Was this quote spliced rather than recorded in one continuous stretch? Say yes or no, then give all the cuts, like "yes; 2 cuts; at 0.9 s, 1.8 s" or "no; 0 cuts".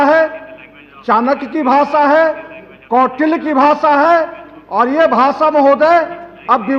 no; 0 cuts